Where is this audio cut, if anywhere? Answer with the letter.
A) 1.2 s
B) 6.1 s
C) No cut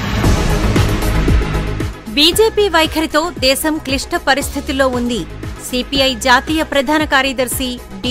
A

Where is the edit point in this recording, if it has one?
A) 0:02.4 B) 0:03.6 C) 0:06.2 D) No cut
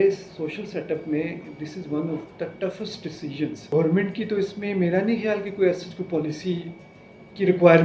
B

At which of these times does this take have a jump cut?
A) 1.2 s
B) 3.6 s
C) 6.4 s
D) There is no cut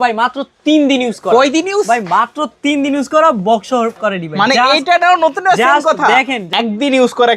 C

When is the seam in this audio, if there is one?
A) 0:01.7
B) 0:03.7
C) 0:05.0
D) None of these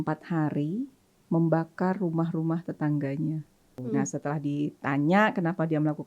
B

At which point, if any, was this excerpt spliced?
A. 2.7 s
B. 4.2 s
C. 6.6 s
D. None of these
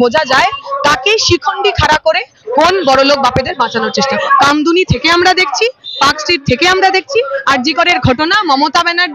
B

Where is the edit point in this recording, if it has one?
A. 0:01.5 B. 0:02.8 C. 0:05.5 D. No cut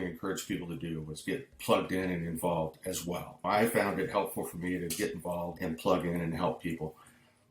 D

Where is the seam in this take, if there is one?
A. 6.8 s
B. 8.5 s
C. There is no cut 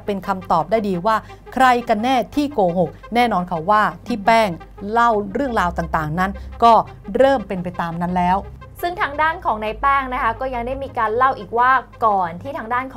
B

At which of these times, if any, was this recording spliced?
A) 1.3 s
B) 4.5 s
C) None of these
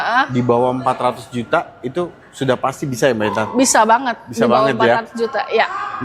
C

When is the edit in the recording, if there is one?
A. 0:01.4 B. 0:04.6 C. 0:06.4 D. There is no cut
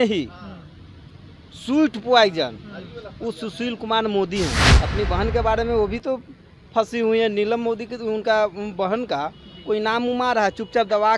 B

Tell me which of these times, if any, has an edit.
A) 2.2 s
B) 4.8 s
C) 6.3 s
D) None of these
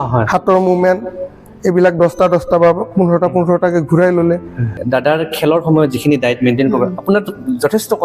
B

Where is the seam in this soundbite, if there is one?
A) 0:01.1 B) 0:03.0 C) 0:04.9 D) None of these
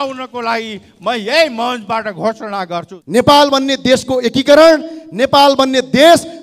B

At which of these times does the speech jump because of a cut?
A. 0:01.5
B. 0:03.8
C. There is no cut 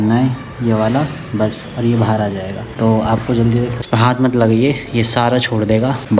B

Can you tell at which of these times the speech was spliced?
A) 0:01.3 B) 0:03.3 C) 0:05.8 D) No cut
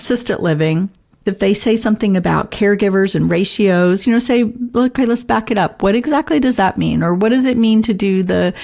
A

